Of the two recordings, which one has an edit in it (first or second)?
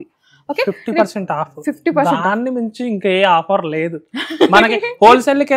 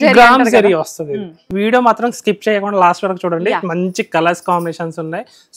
second